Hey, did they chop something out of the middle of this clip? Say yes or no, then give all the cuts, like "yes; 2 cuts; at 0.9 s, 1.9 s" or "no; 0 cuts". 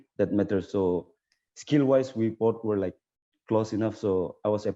no; 0 cuts